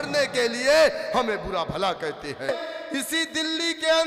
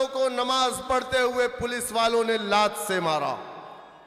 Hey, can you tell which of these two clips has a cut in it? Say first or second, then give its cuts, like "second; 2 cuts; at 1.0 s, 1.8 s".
first; 1 cut; at 2.5 s